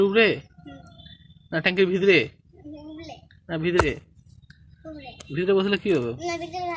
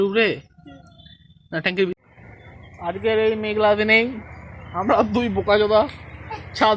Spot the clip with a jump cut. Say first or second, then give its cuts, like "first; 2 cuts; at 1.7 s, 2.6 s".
second; 1 cut; at 1.9 s